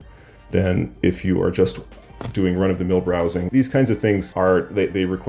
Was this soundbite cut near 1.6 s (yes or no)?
no